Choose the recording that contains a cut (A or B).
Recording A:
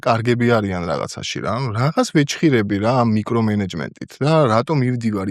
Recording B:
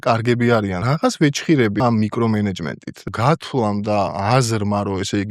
B